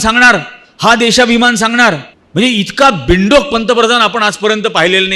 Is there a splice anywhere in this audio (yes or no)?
yes